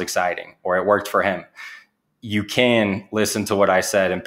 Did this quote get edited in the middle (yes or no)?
no